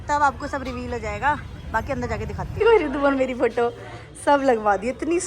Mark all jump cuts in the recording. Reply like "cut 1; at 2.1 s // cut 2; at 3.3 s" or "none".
cut 1; at 2.6 s